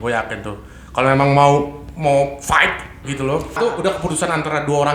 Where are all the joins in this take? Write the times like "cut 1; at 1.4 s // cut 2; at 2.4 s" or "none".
cut 1; at 3.6 s